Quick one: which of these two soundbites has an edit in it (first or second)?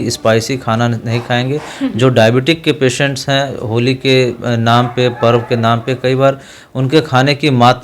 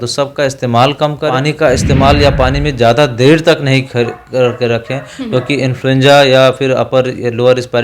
second